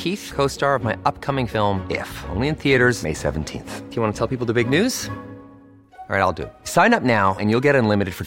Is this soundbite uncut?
yes; 0 cuts

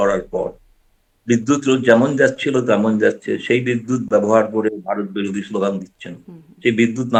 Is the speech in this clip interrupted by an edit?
no; 0 cuts

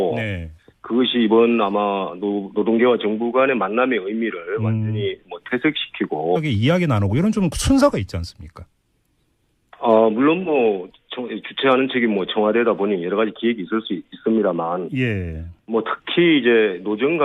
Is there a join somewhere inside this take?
no; 0 cuts

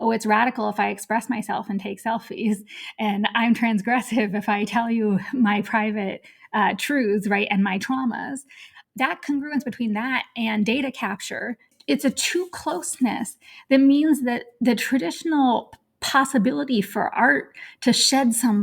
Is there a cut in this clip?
yes; 2 cuts; at 8.8 s, 11.8 s

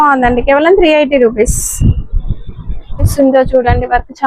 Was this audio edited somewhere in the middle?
yes; 1 cut; at 3.1 s

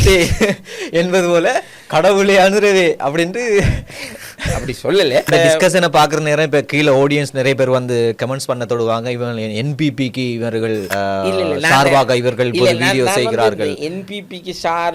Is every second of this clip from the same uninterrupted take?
no; 2 cuts; at 5.3 s, 10.9 s

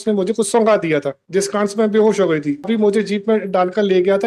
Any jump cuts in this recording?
yes; 1 cut; at 2.7 s

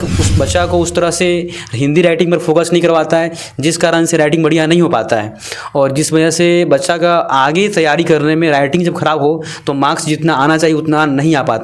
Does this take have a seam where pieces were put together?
no; 0 cuts

